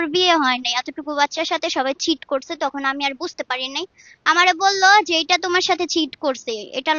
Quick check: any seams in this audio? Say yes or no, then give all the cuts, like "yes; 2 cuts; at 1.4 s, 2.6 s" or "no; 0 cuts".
no; 0 cuts